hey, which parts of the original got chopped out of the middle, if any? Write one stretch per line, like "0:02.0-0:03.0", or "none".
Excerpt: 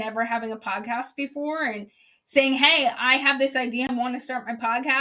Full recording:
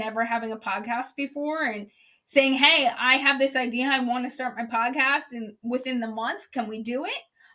0:03.9-0:04.0